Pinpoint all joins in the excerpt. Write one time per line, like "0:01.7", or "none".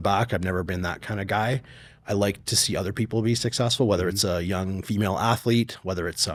none